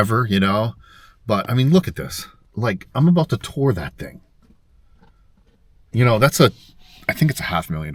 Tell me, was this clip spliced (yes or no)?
yes